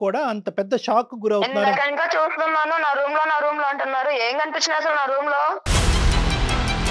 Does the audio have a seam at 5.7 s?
yes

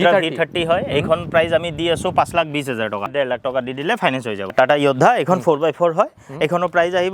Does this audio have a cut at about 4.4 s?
yes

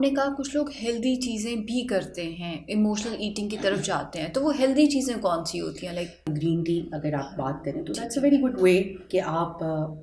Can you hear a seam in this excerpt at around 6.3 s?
yes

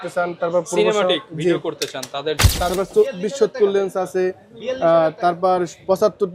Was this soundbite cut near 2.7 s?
yes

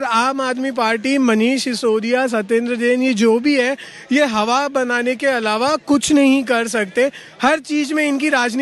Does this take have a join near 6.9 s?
no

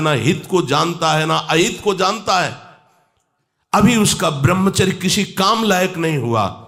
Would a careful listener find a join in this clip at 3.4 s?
no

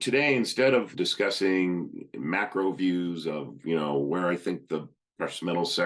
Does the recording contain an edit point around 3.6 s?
no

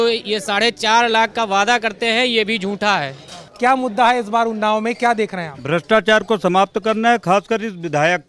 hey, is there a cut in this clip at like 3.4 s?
yes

